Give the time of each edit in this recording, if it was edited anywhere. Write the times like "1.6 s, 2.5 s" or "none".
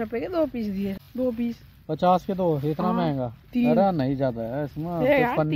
1.0 s